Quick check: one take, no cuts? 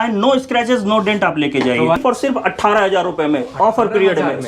no; 1 cut; at 2.0 s

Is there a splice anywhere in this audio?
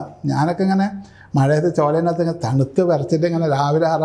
no; 0 cuts

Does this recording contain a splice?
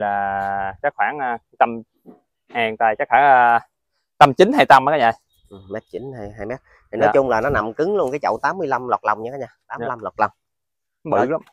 no; 0 cuts

